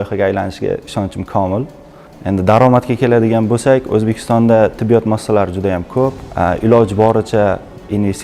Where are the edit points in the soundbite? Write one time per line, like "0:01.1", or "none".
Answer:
0:06.2